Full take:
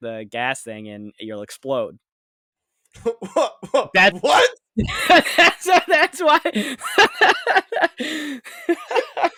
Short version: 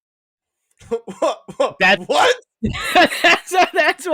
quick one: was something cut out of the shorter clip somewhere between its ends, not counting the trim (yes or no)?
no